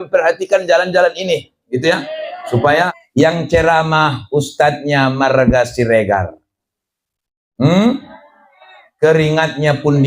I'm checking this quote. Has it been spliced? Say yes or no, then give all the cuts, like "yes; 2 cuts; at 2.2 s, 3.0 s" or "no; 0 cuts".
yes; 1 cut; at 3.0 s